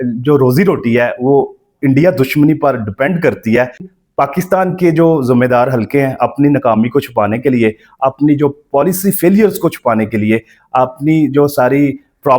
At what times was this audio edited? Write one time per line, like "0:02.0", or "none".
0:03.9